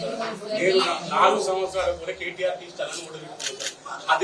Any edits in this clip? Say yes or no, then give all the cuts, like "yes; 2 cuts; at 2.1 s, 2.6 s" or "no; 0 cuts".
no; 0 cuts